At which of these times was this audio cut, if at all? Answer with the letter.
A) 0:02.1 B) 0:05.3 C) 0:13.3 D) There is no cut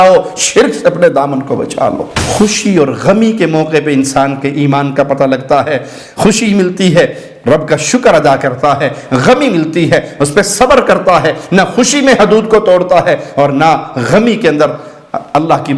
A